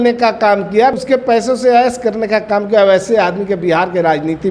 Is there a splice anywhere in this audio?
yes; 1 cut; at 0.9 s

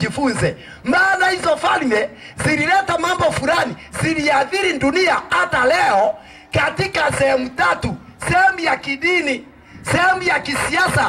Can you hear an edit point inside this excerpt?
no; 0 cuts

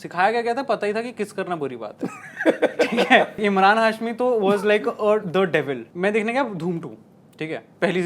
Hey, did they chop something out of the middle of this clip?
yes; 2 cuts; at 3.4 s, 5.9 s

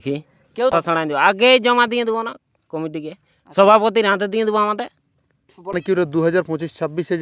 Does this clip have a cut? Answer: yes; 2 cuts; at 0.7 s, 5.7 s

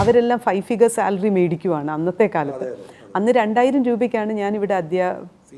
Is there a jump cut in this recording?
no; 0 cuts

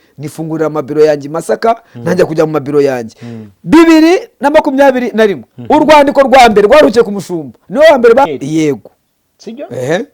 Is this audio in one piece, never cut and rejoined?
no; 1 cut; at 8.3 s

